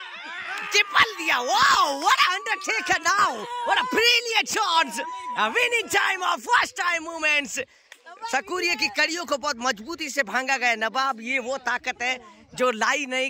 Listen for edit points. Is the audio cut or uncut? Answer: uncut